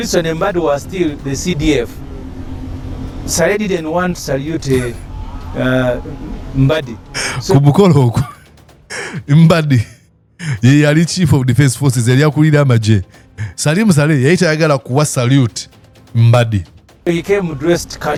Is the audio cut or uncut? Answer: uncut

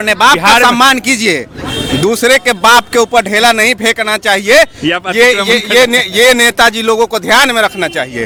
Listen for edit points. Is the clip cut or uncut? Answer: uncut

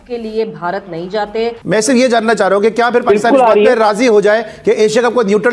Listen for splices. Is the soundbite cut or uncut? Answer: cut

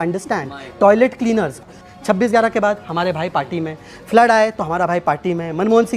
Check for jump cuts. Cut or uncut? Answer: cut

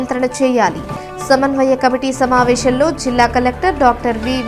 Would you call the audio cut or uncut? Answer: uncut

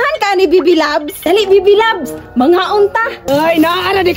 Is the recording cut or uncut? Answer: cut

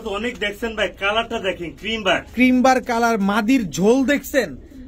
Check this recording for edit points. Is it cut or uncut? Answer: uncut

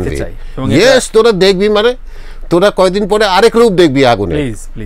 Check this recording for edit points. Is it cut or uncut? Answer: uncut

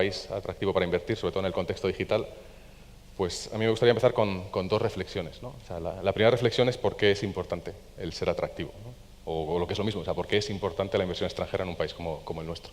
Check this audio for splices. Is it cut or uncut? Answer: uncut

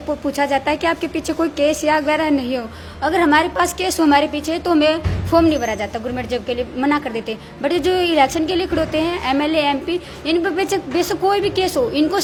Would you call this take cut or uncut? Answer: uncut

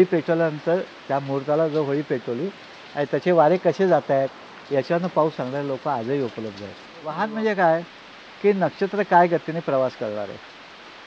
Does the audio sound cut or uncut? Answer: cut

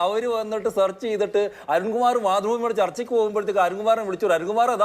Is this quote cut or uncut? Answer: uncut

